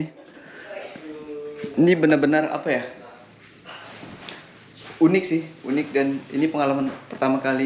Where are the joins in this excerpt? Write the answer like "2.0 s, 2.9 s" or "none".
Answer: none